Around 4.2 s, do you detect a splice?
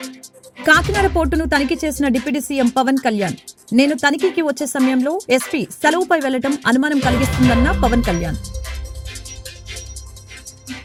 no; 0 cuts

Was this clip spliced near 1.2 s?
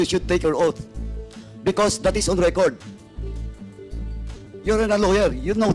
no; 2 cuts; at 2.7 s, 4.1 s

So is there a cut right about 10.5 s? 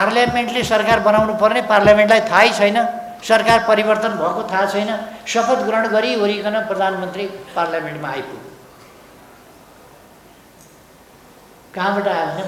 no; 0 cuts

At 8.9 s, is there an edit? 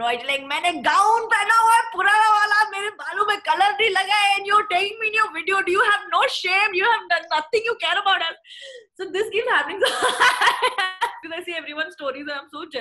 no; 1 cut; at 11.2 s

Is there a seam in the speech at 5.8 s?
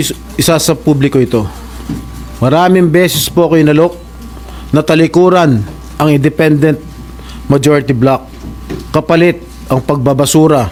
no; 0 cuts

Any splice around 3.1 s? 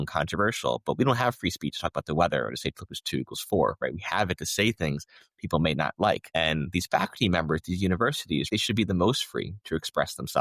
no; 2 cuts; at 6.2 s, 8.5 s

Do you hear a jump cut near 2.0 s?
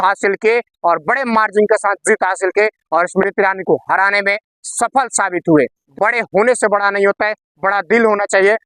no; 1 cut; at 5.8 s

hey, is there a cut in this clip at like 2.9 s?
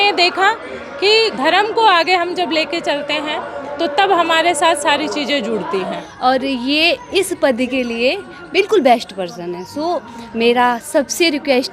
no; 2 cuts; at 1.3 s, 6.0 s

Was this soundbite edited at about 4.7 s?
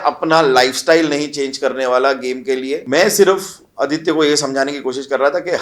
no; 1 cut; at 2.8 s

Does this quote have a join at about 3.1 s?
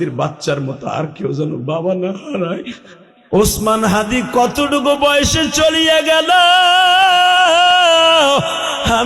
yes; 1 cut; at 3.1 s

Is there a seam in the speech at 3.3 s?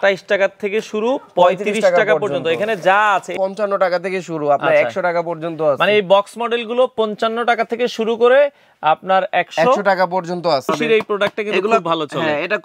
yes; 2 cuts; at 3.3 s, 10.7 s

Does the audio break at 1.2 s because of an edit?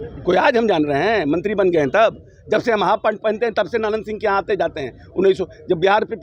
no; 0 cuts

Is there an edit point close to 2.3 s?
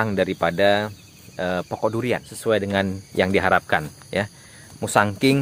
yes; 1 cut; at 2.3 s

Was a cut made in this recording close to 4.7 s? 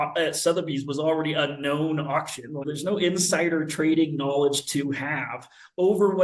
no; 1 cut; at 2.7 s

